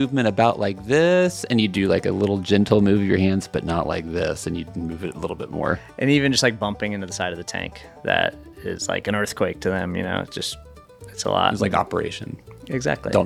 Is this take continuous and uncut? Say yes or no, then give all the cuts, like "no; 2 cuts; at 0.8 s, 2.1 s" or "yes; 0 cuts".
yes; 0 cuts